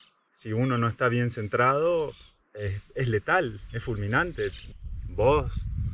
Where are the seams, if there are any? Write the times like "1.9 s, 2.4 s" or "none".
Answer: 4.7 s

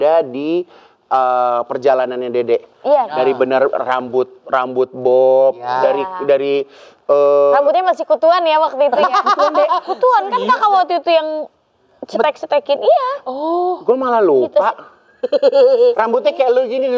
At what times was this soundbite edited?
none

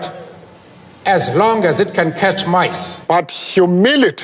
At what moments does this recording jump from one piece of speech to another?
2.9 s

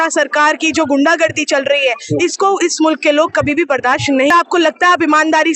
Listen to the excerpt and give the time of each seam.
4.3 s

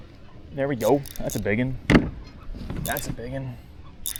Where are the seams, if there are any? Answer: none

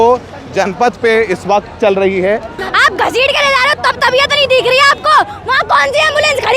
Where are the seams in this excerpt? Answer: 2.6 s

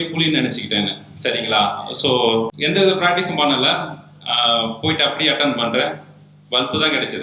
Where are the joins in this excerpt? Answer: 2.5 s

